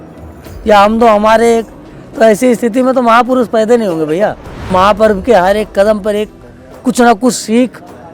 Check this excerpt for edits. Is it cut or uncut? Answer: cut